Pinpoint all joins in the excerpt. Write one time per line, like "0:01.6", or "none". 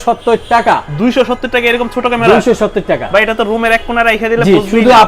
none